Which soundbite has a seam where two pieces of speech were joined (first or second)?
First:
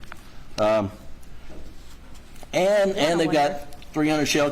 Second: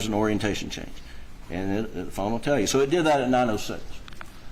first